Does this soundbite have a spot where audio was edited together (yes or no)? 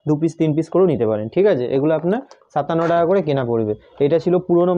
no